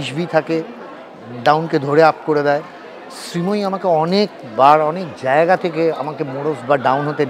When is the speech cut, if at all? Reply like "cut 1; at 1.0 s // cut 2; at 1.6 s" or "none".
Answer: none